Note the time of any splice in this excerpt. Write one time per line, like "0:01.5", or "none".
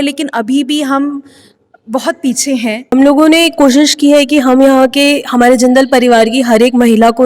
0:02.9